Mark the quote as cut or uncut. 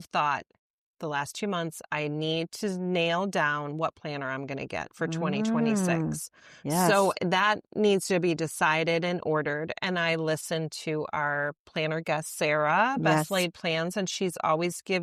uncut